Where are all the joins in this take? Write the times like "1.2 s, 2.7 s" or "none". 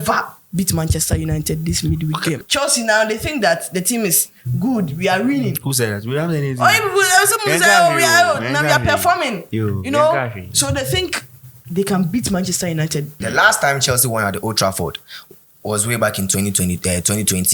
2.4 s, 13.1 s